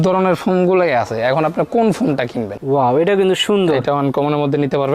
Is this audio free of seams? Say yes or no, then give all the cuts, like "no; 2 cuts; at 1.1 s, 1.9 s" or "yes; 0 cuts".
no; 1 cut; at 2.5 s